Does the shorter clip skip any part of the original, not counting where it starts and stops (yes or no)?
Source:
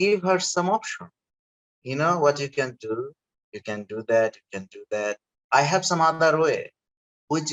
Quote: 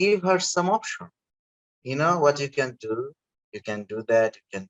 no